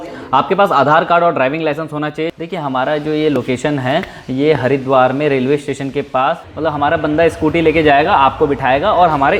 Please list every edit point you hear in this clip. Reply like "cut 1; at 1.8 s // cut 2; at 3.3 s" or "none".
cut 1; at 2.2 s // cut 2; at 6.5 s